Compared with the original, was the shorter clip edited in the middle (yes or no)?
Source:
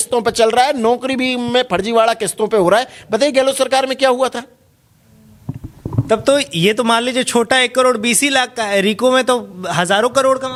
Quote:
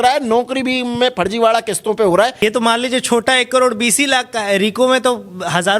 yes